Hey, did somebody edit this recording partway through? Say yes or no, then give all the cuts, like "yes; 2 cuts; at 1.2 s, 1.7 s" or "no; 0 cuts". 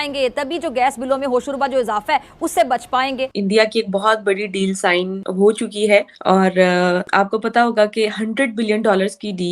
yes; 4 cuts; at 3.4 s, 5.2 s, 6.1 s, 7.0 s